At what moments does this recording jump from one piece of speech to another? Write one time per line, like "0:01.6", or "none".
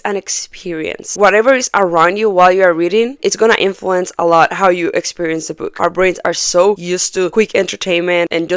0:01.0
0:03.2
0:05.7
0:07.3